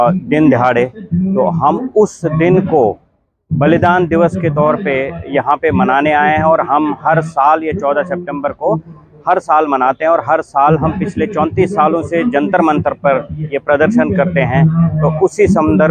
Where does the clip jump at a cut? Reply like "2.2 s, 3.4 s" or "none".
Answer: none